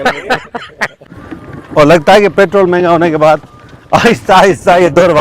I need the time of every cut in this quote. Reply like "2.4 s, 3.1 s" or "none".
1.0 s